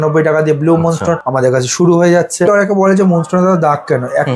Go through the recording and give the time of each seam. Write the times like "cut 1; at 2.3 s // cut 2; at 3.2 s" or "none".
cut 1; at 1.3 s // cut 2; at 2.5 s